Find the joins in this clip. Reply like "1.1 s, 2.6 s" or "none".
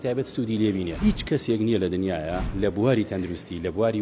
0.9 s, 2.4 s

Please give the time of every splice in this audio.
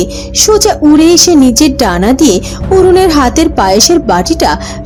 none

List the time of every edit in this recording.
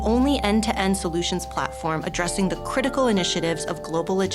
none

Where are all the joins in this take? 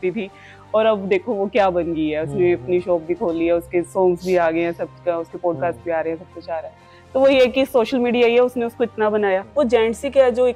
9.5 s

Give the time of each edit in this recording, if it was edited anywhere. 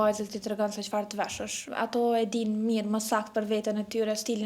1.6 s

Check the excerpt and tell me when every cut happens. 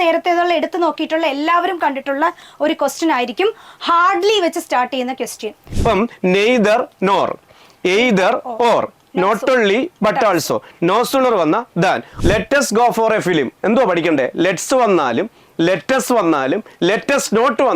5.7 s, 12.1 s

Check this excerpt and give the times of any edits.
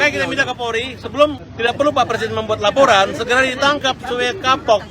1.4 s

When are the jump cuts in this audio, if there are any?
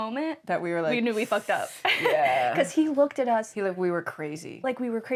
none

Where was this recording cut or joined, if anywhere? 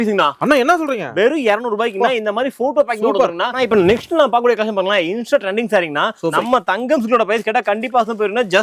3.5 s, 6.3 s

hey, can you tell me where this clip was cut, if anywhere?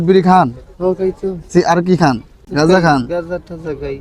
2.4 s

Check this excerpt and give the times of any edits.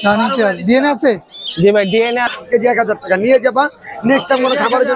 2.3 s

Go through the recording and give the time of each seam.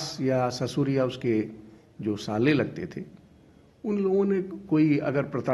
none

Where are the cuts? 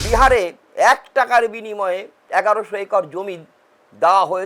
2.2 s

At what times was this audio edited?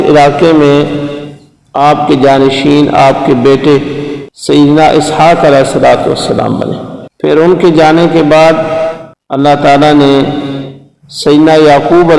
none

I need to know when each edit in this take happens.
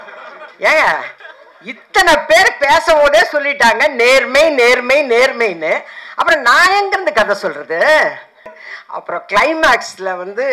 8.5 s

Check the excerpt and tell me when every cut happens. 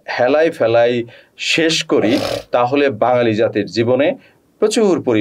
none

